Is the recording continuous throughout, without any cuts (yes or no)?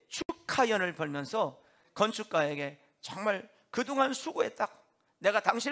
no